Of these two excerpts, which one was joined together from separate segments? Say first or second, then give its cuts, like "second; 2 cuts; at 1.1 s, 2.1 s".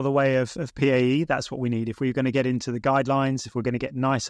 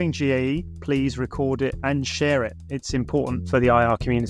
second; 2 cuts; at 1.8 s, 3.4 s